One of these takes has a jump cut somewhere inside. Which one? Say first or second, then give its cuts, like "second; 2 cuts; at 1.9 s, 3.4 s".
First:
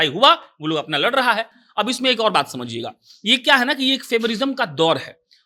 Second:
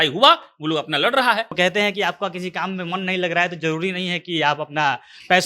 second; 1 cut; at 1.5 s